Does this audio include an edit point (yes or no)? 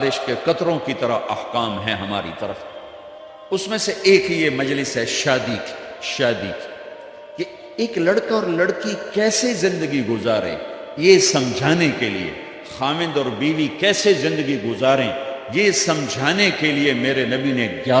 no